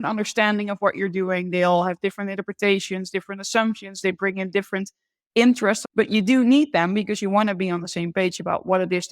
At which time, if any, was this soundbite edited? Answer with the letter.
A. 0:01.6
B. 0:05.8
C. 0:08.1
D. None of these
B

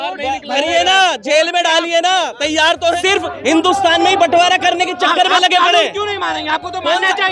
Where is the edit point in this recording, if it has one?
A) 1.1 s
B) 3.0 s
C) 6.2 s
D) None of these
B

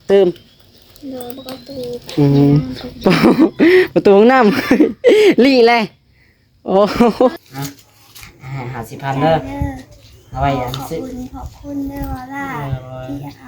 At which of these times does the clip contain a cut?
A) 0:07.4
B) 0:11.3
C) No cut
A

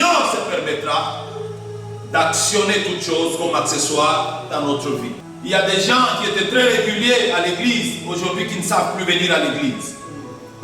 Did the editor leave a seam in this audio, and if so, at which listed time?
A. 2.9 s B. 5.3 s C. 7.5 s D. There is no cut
B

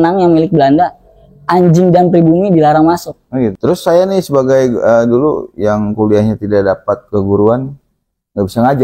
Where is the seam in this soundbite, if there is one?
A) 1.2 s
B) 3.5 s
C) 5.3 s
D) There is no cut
B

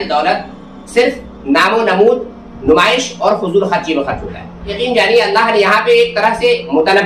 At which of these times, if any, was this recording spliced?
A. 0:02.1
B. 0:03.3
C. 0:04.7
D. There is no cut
C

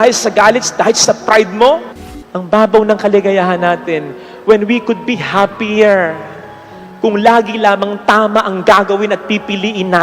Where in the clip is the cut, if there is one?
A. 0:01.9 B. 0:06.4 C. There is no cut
A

